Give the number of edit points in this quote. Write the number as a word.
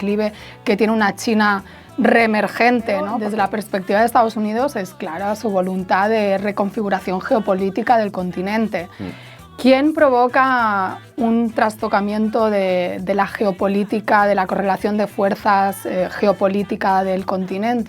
one